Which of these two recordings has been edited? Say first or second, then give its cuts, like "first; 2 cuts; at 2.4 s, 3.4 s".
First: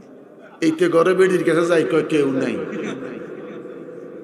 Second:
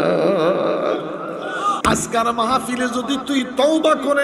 second; 1 cut; at 1.8 s